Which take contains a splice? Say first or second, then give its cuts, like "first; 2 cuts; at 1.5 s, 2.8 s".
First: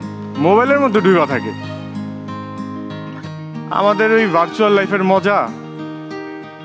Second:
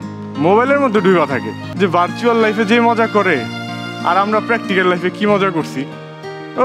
second; 1 cut; at 1.6 s